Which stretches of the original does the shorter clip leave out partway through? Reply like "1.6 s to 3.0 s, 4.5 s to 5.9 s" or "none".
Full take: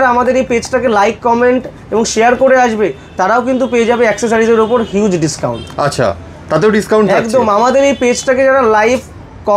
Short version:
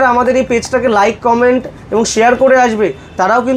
none